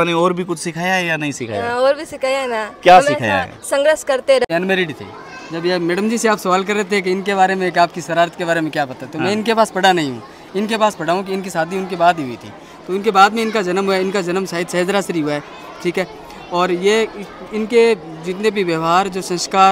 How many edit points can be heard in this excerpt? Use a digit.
1